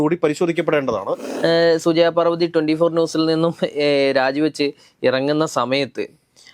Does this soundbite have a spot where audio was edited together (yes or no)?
yes